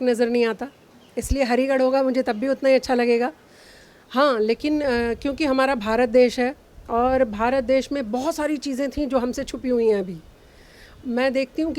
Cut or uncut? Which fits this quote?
uncut